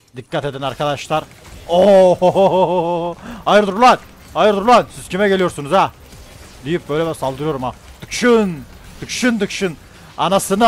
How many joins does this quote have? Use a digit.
0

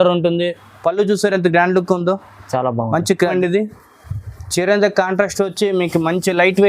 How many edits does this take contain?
1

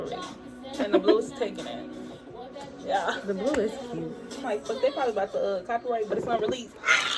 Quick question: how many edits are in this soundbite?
1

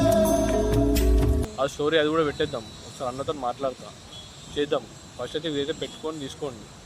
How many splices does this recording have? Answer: 1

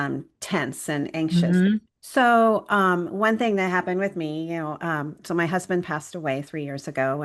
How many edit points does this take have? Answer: 0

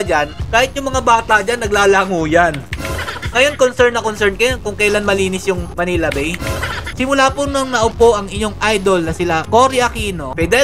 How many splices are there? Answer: 1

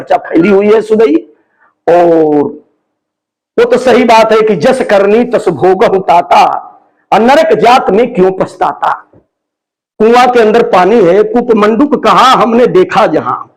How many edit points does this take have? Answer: 1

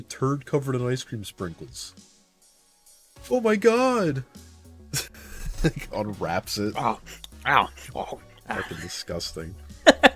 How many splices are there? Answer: 0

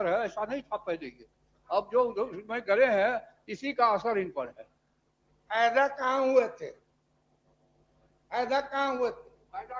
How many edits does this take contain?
0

